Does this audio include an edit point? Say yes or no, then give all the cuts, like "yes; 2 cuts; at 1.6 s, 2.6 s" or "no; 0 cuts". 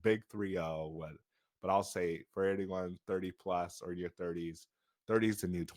no; 0 cuts